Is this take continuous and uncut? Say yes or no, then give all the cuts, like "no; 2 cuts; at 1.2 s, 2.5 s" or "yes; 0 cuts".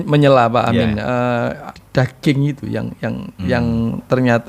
no; 1 cut; at 1.8 s